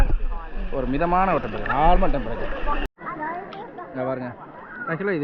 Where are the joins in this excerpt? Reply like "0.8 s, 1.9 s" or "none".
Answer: 2.8 s